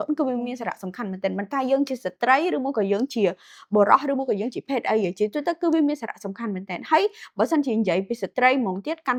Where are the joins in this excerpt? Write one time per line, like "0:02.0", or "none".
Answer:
none